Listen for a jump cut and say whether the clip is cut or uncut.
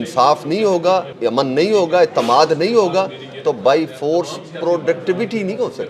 cut